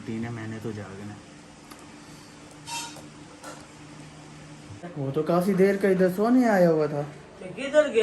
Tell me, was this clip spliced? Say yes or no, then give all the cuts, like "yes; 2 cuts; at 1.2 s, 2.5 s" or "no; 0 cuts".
yes; 1 cut; at 4.9 s